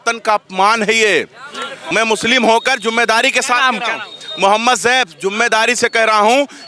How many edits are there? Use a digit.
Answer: 1